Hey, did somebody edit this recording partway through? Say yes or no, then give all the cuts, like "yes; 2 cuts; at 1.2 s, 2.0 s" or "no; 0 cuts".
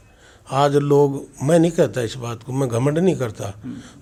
no; 0 cuts